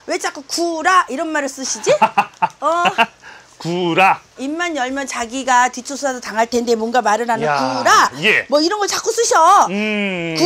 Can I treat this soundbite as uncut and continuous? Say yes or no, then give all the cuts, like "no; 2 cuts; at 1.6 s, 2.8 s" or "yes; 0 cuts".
yes; 0 cuts